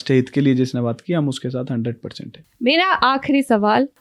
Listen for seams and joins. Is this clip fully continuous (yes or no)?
yes